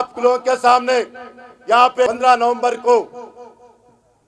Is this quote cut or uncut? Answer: cut